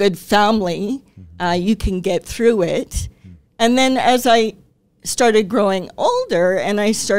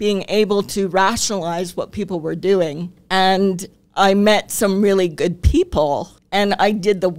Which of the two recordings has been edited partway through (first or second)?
second